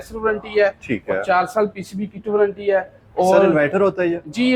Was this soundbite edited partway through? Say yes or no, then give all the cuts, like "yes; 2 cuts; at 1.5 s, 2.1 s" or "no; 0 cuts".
no; 0 cuts